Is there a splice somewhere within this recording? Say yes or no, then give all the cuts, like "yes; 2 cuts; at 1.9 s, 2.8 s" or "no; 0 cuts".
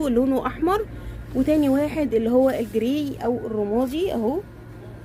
no; 0 cuts